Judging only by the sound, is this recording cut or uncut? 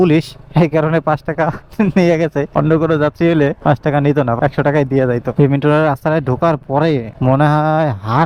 uncut